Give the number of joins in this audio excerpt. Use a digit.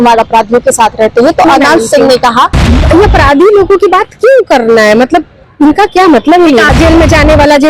2